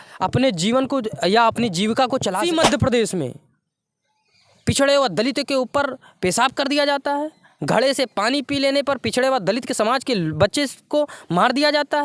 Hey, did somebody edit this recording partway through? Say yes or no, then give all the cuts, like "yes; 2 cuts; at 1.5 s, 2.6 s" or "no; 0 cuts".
yes; 1 cut; at 2.4 s